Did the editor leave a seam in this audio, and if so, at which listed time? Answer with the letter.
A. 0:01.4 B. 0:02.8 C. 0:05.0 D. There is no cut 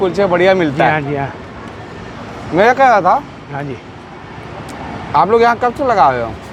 D